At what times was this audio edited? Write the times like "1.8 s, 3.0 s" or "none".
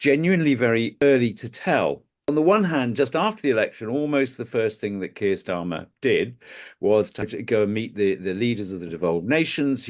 1.0 s, 2.1 s, 7.3 s